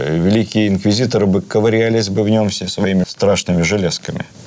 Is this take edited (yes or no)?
yes